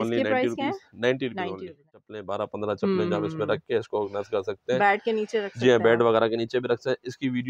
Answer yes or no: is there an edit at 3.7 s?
no